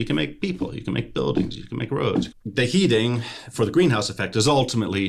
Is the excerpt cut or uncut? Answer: cut